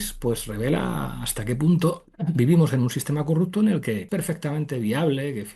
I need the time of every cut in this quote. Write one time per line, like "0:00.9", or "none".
0:04.1